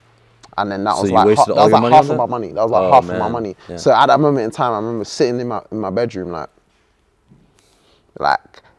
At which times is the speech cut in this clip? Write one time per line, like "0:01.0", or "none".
none